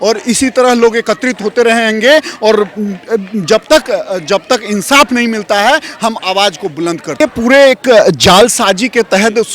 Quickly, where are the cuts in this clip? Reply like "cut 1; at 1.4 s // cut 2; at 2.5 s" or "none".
cut 1; at 7.2 s